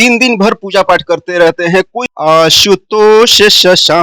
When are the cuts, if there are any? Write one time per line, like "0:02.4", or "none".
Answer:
0:02.0